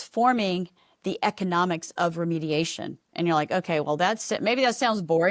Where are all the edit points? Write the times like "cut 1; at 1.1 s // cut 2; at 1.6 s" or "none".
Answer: none